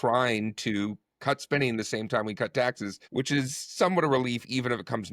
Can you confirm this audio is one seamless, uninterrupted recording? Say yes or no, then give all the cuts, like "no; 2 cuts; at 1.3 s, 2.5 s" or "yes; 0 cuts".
no; 1 cut; at 2.9 s